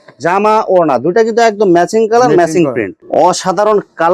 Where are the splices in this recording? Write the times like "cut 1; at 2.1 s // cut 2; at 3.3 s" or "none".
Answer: cut 1; at 2.9 s